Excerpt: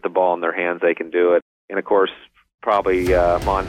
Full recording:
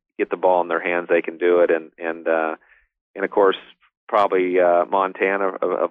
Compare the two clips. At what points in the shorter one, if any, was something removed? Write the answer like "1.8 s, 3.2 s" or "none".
1.4 s

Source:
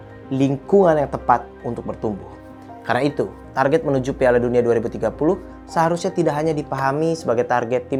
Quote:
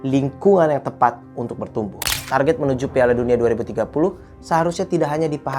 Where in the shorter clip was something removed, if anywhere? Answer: 2.1 s

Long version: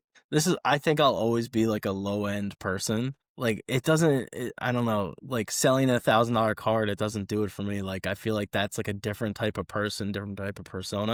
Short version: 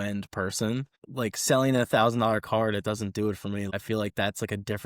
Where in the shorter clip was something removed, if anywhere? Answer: 1.0 s, 3.7 s

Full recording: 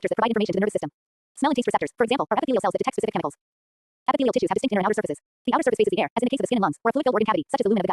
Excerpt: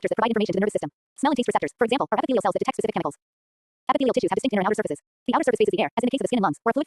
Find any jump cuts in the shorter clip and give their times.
1.0 s

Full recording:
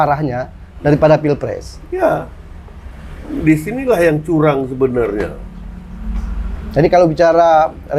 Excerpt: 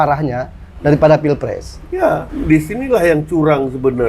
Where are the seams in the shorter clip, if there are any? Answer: 2.3 s

